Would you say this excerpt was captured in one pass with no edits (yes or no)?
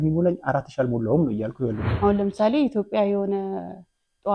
no